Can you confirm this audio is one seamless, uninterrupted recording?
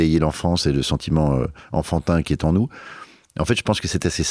yes; 0 cuts

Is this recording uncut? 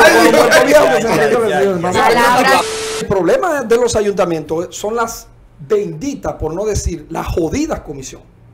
no; 1 cut; at 2.6 s

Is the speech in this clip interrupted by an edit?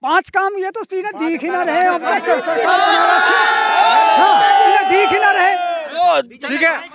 yes; 1 cut; at 5.9 s

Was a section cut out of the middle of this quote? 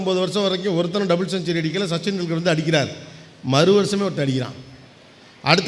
no; 0 cuts

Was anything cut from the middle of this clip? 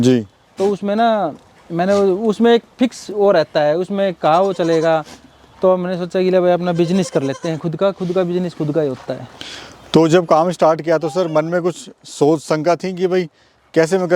no; 0 cuts

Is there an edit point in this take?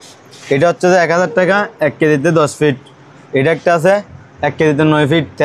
no; 0 cuts

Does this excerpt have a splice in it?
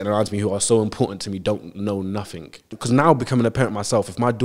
yes; 1 cut; at 2.7 s

